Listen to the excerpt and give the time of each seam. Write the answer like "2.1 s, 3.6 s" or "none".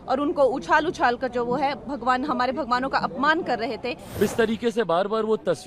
4.2 s